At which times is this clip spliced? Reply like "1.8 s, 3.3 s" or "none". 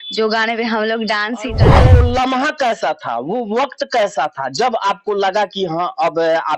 1.7 s